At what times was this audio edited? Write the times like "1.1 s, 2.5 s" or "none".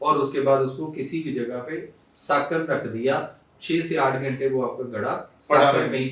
none